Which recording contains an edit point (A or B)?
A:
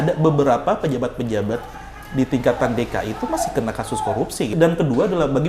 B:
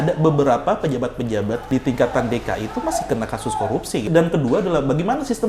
B